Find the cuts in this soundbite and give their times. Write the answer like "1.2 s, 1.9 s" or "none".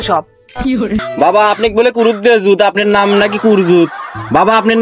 1.1 s